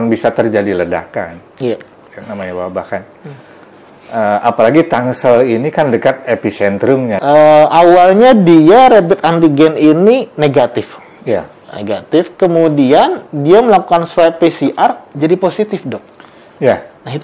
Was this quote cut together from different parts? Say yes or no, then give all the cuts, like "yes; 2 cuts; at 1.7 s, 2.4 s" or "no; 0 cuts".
yes; 1 cut; at 7.2 s